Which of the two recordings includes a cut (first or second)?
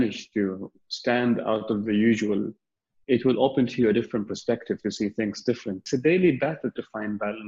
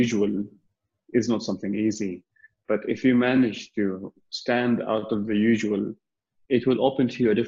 first